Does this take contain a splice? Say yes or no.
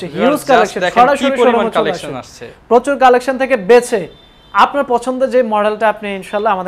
no